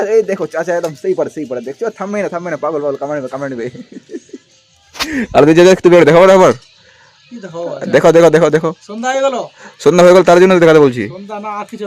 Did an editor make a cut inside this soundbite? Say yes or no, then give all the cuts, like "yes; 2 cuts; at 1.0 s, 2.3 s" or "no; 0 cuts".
no; 0 cuts